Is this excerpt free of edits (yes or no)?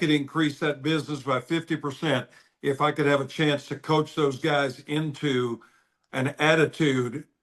yes